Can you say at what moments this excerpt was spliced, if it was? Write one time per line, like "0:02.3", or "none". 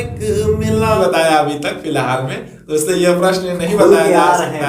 0:01.0